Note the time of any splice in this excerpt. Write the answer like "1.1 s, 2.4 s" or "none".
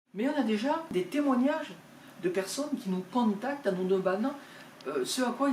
0.9 s